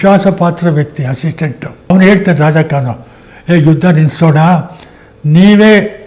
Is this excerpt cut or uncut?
cut